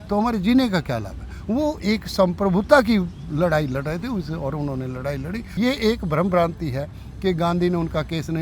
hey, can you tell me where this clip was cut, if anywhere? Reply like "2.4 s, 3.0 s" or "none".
5.5 s